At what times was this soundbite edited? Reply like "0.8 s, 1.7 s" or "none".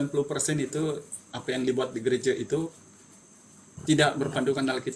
none